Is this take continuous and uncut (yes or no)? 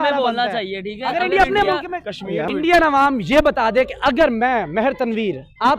no